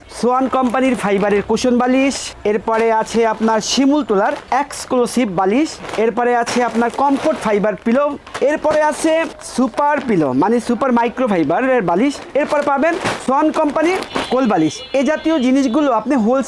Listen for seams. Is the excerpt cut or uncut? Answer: uncut